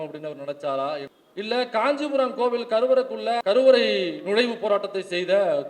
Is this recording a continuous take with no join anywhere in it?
no; 2 cuts; at 1.1 s, 3.4 s

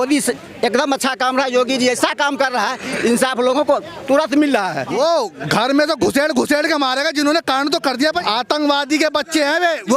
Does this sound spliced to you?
yes; 2 cuts; at 4.9 s, 8.2 s

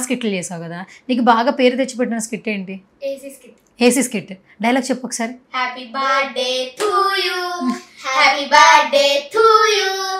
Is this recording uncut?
yes; 0 cuts

